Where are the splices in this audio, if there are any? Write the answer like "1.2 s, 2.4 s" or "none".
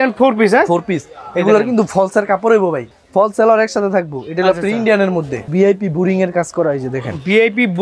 2.9 s, 5.5 s